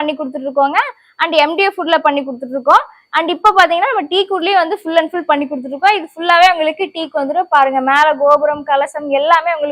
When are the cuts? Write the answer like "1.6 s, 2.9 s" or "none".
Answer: none